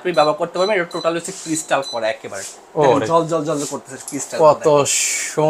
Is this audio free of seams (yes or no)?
yes